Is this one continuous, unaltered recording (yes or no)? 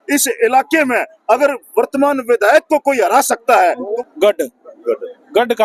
no